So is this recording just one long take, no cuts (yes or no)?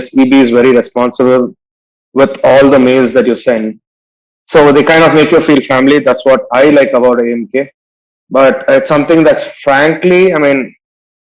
yes